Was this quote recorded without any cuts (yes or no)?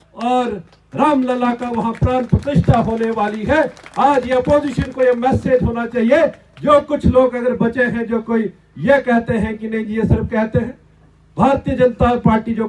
yes